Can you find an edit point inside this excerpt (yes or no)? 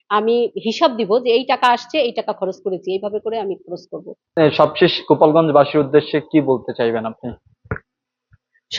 no